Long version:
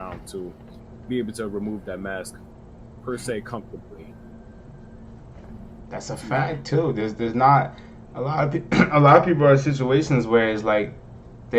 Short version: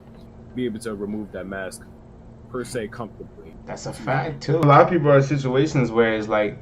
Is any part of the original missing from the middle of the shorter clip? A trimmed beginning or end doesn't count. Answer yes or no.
yes